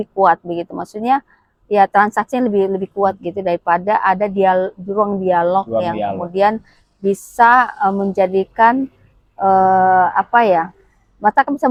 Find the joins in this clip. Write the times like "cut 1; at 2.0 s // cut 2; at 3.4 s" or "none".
none